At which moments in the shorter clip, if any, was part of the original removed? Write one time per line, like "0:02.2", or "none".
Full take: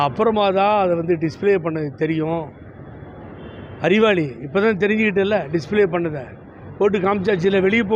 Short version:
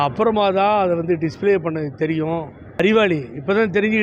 0:02.6